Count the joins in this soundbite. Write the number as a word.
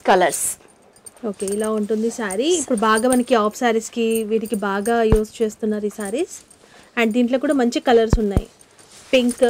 zero